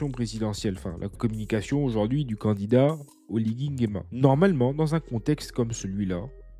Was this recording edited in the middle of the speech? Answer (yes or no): no